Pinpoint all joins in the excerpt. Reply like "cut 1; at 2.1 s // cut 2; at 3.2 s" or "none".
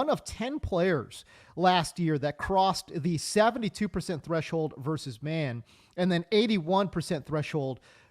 none